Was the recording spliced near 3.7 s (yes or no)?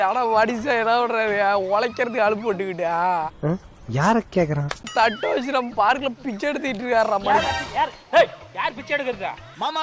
no